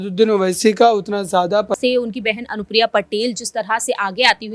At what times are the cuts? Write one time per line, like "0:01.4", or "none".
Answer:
0:01.8